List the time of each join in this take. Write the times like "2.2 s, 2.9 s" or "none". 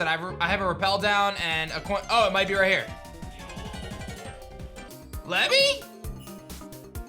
4.9 s